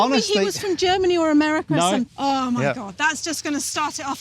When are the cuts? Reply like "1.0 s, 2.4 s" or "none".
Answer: 2.1 s